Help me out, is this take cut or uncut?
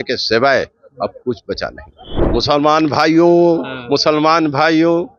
cut